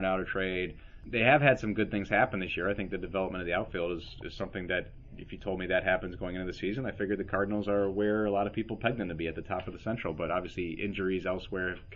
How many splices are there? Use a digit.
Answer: 1